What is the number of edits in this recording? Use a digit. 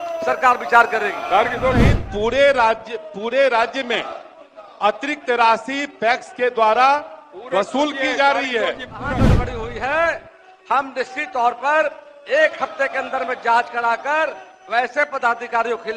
2